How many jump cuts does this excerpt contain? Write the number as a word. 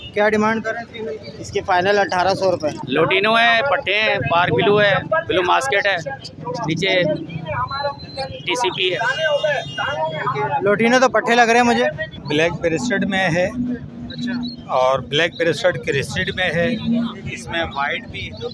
two